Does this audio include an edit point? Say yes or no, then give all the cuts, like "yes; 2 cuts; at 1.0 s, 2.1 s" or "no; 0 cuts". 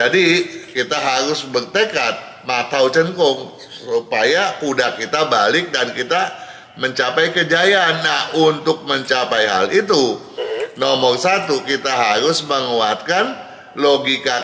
no; 0 cuts